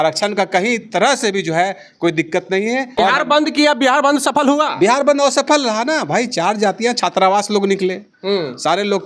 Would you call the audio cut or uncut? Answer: cut